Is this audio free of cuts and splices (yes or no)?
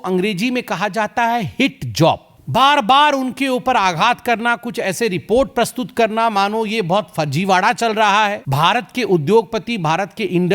no